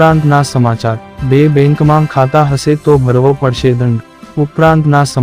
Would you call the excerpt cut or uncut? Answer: cut